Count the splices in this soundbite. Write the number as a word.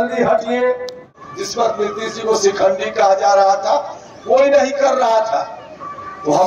one